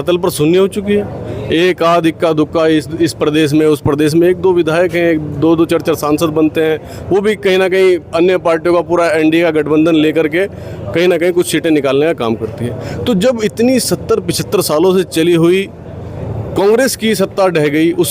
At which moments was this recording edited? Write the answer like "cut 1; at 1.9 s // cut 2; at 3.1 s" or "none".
none